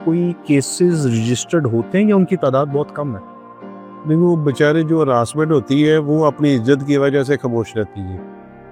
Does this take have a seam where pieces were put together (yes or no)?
no